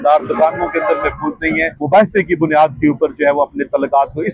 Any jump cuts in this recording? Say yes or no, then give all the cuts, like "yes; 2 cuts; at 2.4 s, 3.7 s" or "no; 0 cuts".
yes; 1 cut; at 1.7 s